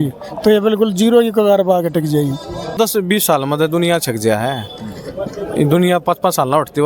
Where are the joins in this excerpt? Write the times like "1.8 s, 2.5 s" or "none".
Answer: 2.7 s